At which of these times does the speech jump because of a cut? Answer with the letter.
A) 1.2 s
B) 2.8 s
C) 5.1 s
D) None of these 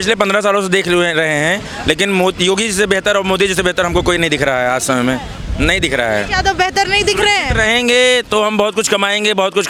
D